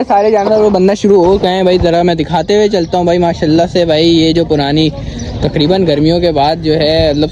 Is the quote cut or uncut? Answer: uncut